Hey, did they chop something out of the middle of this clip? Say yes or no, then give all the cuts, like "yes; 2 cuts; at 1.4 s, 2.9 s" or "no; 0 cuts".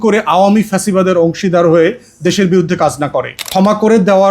yes; 1 cut; at 3.4 s